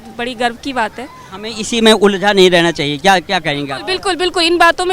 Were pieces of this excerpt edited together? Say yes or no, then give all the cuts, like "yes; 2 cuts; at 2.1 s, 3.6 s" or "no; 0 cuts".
no; 0 cuts